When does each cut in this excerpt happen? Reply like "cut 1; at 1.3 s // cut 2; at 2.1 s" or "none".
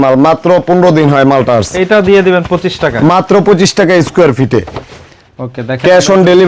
none

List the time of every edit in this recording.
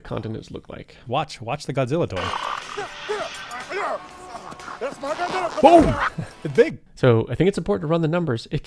cut 1; at 1.0 s // cut 2; at 6.8 s

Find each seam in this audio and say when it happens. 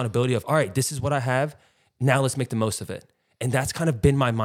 none

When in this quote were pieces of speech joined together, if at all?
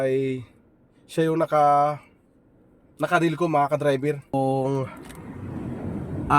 cut 1; at 4.3 s

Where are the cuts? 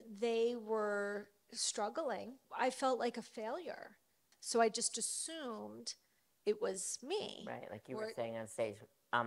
cut 1; at 2.4 s // cut 2; at 4.2 s

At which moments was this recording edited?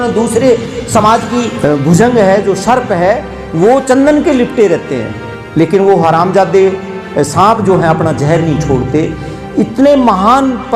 cut 1; at 1.5 s

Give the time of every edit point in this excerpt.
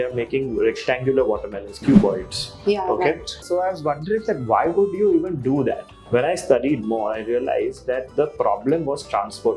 cut 1; at 3.4 s // cut 2; at 5.9 s

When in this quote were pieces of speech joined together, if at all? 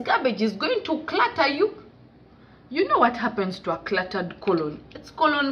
none

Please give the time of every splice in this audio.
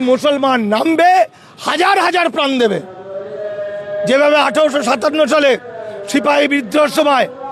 none

